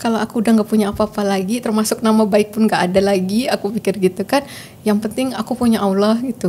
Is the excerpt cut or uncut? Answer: uncut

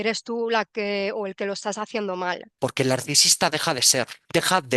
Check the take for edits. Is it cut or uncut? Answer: cut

